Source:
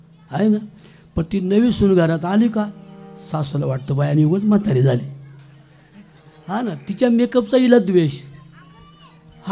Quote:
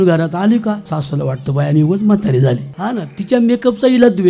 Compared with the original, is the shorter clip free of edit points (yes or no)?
no